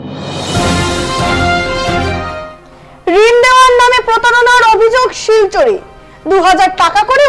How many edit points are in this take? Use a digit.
1